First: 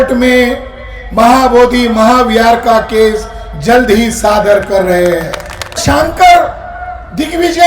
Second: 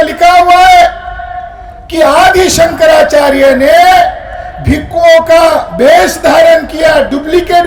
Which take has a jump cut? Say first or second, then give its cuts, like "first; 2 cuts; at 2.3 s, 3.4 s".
first; 1 cut; at 5.8 s